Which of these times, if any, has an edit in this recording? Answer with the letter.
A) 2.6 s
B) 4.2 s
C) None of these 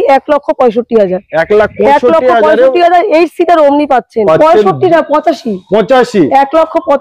B